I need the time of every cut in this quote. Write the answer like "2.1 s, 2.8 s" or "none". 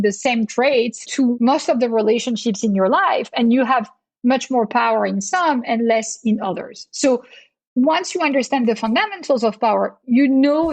1.3 s